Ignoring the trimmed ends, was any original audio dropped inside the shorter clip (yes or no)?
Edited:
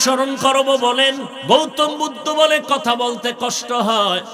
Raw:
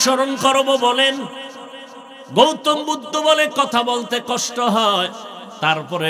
yes